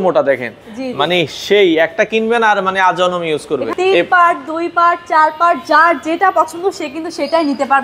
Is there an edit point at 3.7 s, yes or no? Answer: yes